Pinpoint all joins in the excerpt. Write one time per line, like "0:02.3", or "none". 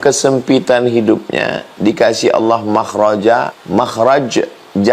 0:03.6